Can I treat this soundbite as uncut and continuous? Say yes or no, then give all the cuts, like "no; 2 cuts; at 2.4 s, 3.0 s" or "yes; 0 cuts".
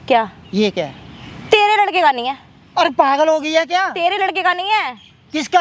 yes; 0 cuts